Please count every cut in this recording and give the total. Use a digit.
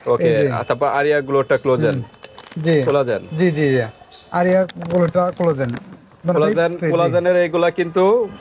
0